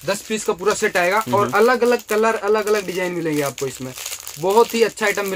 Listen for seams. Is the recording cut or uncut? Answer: uncut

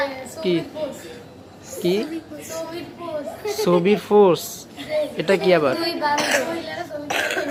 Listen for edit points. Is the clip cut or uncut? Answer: uncut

